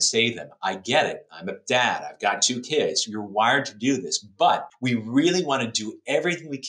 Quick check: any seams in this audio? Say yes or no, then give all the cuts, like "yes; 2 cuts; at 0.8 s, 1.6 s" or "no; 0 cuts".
yes; 1 cut; at 4.7 s